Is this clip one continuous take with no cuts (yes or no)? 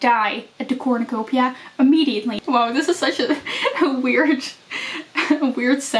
no